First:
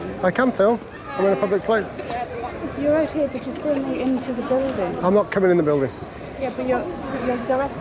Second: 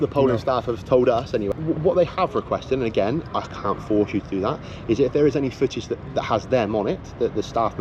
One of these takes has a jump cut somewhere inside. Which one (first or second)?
second